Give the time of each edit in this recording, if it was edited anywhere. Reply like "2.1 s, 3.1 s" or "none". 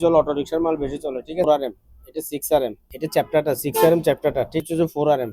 1.4 s, 2.8 s, 4.6 s